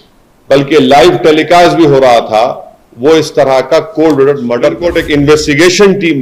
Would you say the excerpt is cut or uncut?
cut